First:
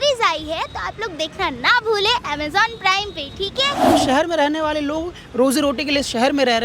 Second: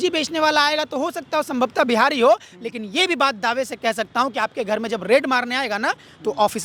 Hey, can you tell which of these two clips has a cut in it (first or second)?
first